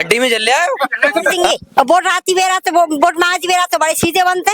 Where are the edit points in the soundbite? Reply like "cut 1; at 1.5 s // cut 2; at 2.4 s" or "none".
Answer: cut 1; at 1.4 s

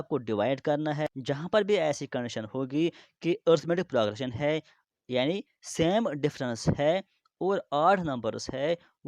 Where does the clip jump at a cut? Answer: cut 1; at 1.1 s

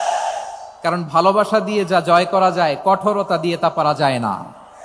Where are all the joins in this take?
none

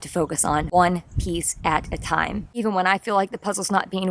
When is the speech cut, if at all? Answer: cut 1; at 2.5 s

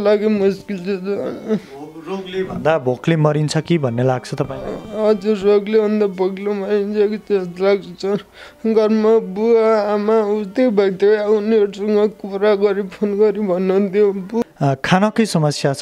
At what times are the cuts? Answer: cut 1; at 14.4 s

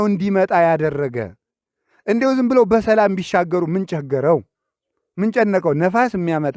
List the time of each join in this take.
none

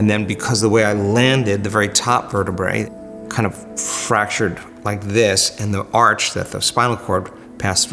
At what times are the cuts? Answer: cut 1; at 2.9 s

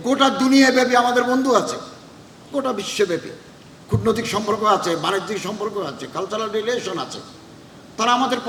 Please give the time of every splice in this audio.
none

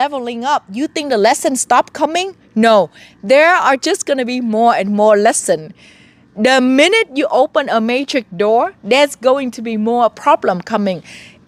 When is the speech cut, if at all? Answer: none

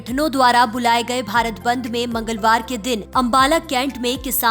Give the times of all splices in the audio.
cut 1; at 3.1 s

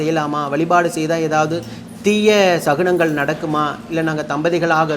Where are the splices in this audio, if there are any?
none

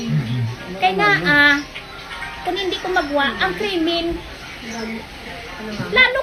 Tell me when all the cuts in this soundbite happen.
none

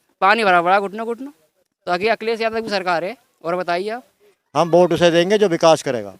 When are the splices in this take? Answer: cut 1; at 4.1 s

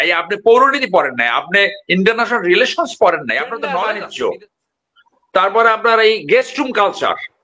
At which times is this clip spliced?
cut 1; at 3.8 s

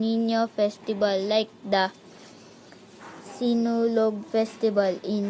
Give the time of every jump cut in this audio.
cut 1; at 1.3 s

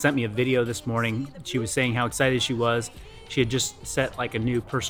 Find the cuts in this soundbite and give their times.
none

